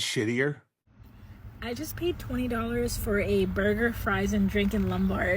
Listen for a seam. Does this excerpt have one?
yes; 1 cut; at 1.2 s

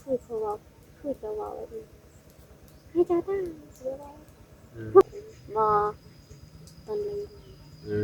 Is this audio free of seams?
no; 1 cut; at 5.0 s

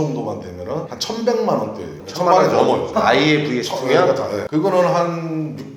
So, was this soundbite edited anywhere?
yes; 3 cuts; at 0.9 s, 2.9 s, 4.4 s

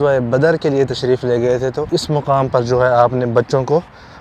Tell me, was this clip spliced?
yes; 1 cut; at 1.9 s

